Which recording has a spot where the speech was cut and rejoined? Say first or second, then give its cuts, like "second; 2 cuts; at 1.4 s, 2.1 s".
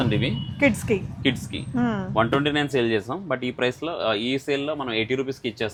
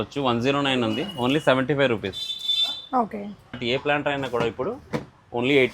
second; 1 cut; at 3.6 s